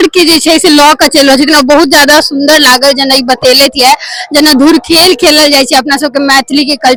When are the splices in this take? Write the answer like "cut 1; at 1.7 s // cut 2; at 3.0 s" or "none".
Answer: none

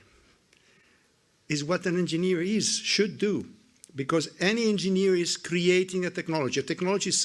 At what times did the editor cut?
none

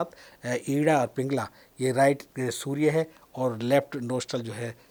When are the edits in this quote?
none

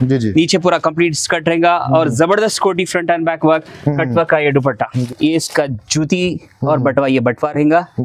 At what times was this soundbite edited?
cut 1; at 5.1 s

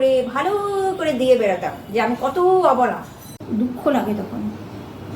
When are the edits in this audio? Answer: cut 1; at 3.4 s

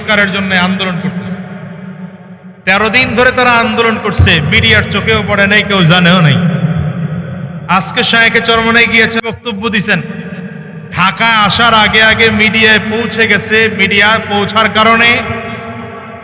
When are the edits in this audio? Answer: cut 1; at 9.2 s

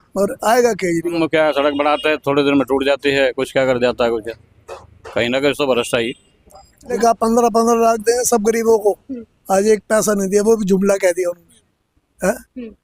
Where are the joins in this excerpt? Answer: cut 1; at 1.1 s // cut 2; at 6.9 s

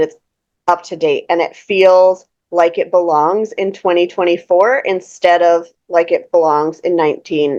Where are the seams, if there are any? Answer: none

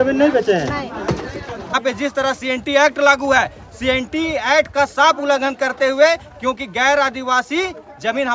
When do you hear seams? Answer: cut 1; at 1.7 s

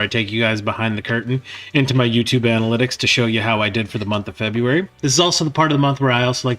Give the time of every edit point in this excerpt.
cut 1; at 4.9 s

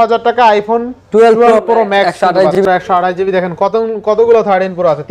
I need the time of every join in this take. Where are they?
cut 1; at 2.5 s

